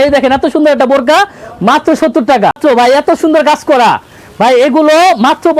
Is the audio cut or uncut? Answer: cut